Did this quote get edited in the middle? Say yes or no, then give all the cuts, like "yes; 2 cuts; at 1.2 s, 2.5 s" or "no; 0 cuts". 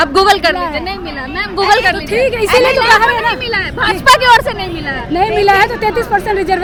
no; 0 cuts